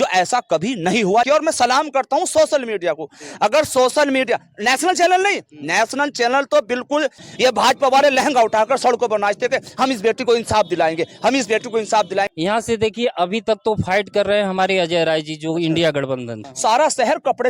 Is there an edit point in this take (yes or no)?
yes